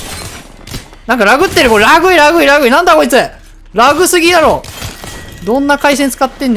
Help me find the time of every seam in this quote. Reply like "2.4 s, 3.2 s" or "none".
none